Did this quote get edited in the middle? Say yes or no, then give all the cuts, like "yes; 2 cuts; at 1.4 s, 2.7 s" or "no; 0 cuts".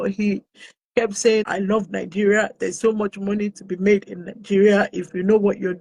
yes; 1 cut; at 1.5 s